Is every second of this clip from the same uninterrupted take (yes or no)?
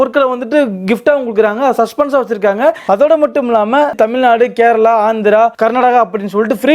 no